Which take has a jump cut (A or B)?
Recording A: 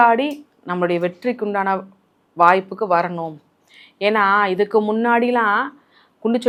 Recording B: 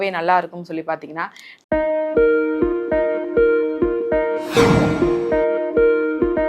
B